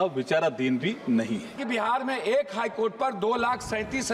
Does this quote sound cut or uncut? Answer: cut